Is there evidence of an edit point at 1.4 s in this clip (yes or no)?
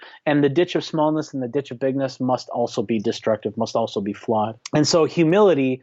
no